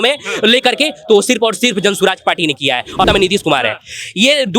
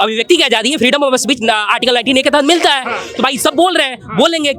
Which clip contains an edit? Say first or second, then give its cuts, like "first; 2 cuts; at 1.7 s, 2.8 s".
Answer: first; 1 cut; at 3.0 s